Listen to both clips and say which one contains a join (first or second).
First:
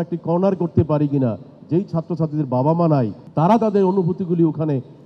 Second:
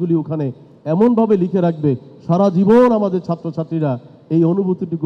first